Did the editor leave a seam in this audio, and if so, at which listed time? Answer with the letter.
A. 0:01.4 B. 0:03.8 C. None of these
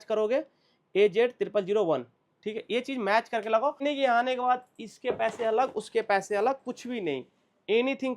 B